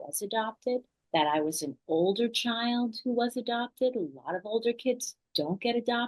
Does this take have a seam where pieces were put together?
yes; 1 cut; at 1.0 s

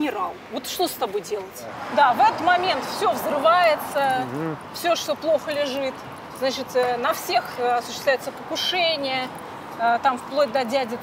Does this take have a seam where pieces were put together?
yes; 1 cut; at 1.8 s

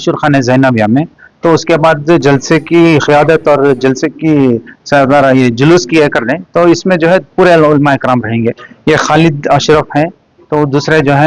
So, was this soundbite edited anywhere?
no; 0 cuts

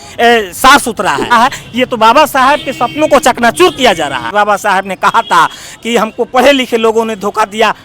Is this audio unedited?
no; 2 cuts; at 1.3 s, 4.3 s

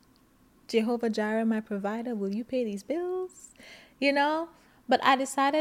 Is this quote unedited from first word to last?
yes; 0 cuts

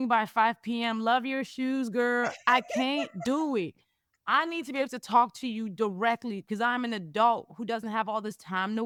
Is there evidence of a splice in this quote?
no; 0 cuts

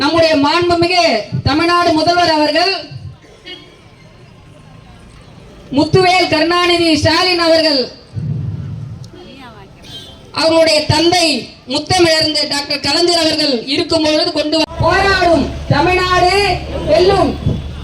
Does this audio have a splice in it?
yes; 1 cut; at 14.7 s

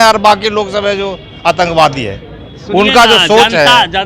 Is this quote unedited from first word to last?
yes; 0 cuts

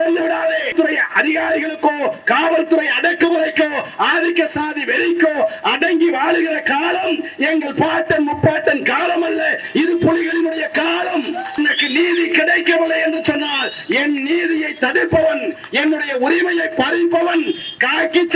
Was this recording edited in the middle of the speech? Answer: yes; 2 cuts; at 0.7 s, 11.6 s

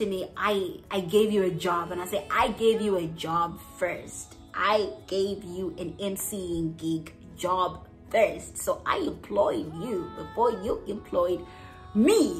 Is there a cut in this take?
no; 0 cuts

